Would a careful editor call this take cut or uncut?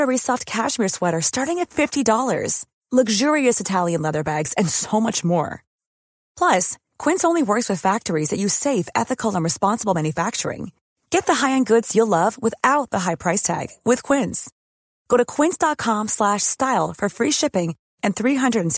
uncut